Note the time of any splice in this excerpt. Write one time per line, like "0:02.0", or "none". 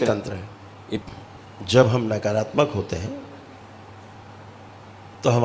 0:01.0
0:03.6